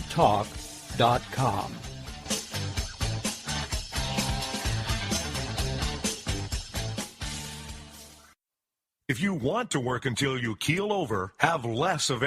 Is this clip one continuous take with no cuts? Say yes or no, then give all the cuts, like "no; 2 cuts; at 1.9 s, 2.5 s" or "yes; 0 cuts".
no; 1 cut; at 8.5 s